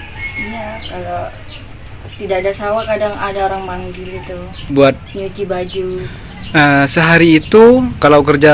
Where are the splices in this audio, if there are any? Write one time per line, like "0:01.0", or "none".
0:04.6
0:06.0